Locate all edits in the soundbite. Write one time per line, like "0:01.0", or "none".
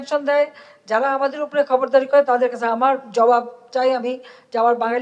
none